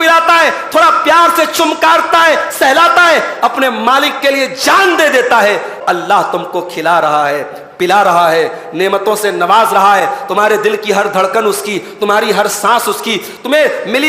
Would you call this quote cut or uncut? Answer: cut